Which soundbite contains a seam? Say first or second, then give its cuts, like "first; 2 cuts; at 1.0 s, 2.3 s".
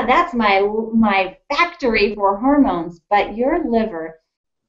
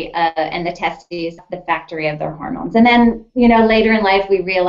second; 1 cut; at 1.4 s